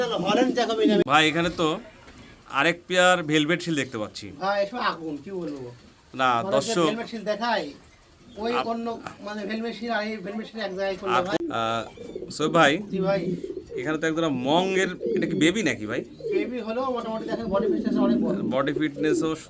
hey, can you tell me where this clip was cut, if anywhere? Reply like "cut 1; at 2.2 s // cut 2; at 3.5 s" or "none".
cut 1; at 1.0 s // cut 2; at 11.4 s